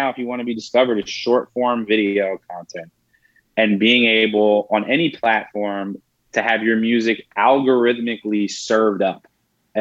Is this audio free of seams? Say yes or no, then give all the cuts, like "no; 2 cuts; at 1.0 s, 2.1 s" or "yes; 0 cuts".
yes; 0 cuts